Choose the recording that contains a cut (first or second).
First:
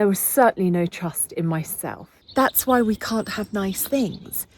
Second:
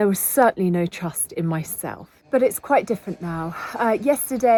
first